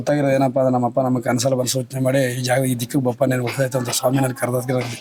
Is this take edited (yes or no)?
no